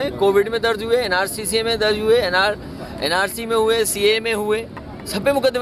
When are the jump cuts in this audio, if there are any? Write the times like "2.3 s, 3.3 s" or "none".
none